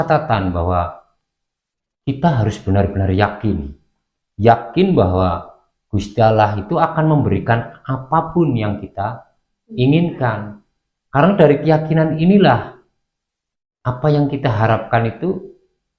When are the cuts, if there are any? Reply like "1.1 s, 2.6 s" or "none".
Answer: none

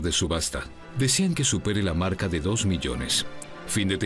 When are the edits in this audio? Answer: 3.2 s

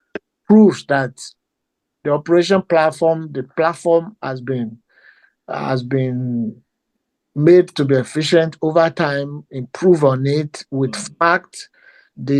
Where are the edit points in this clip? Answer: none

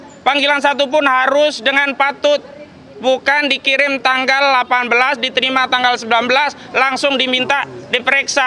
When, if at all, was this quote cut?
none

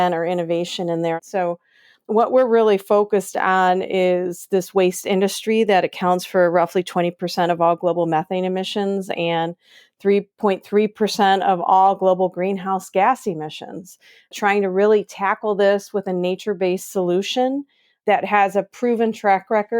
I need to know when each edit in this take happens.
1.2 s

